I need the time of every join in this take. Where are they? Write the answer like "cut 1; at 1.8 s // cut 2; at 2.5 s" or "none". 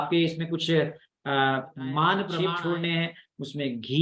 cut 1; at 2.3 s